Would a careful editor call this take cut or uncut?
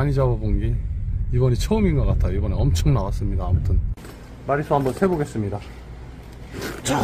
uncut